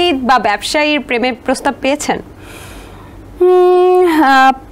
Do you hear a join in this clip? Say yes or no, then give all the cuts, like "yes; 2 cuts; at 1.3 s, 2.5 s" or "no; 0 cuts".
no; 0 cuts